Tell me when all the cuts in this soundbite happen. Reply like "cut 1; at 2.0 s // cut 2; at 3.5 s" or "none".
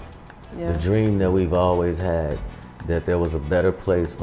none

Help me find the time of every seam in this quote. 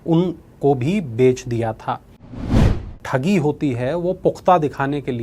cut 1; at 2.7 s

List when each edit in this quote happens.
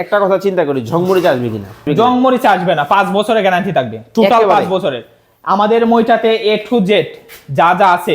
cut 1; at 1.9 s

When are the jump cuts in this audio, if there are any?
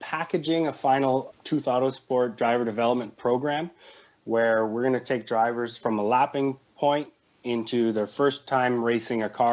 cut 1; at 1.3 s // cut 2; at 5.7 s

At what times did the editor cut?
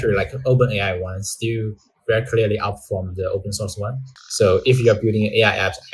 cut 1; at 4.0 s

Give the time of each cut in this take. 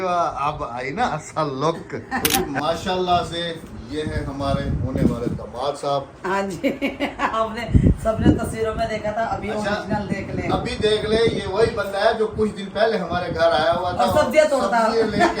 cut 1; at 2.5 s

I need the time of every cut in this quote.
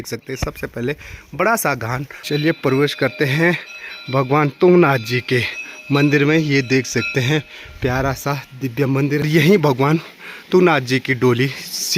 cut 1; at 2.1 s // cut 2; at 9.3 s

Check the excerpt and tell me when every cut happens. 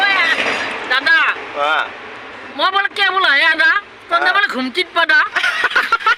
none

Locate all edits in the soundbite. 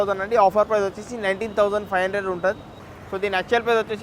cut 1; at 2.8 s

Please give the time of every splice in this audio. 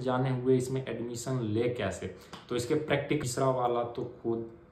cut 1; at 3.2 s

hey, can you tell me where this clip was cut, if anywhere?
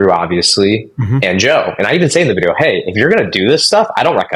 none

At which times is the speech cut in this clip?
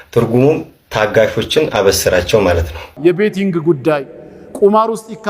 cut 1; at 2.9 s

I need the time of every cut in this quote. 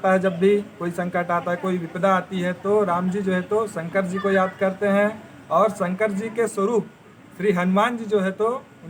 none

